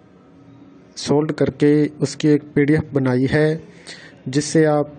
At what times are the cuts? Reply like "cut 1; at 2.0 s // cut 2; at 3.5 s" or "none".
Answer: none